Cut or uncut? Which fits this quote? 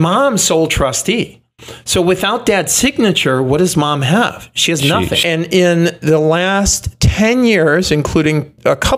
cut